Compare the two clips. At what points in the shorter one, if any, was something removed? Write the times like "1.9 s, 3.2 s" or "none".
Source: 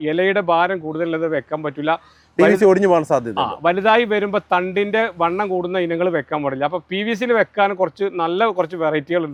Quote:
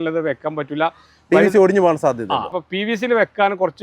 2.5 s

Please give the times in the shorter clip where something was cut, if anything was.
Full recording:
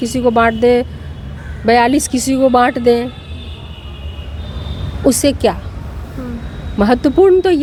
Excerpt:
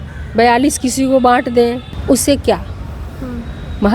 1.9 s

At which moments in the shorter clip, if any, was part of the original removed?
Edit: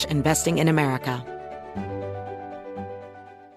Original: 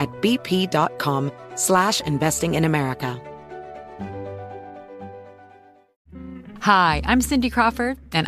1.2 s

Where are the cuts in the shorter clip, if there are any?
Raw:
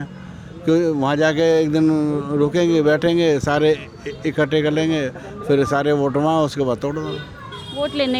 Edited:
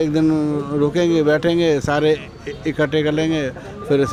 none

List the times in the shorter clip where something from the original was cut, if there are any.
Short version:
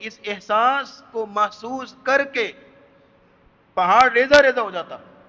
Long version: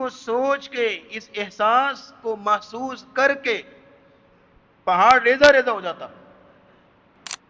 none

